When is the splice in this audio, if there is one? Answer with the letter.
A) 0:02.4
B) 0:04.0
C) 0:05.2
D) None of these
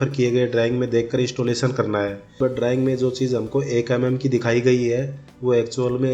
A